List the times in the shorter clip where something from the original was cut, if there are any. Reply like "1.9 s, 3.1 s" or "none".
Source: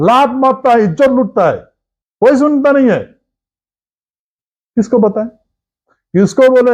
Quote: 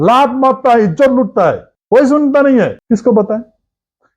1.7 s, 2.8 s